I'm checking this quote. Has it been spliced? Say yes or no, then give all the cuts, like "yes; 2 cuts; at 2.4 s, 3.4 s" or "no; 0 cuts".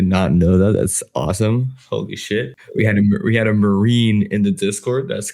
yes; 1 cut; at 2.6 s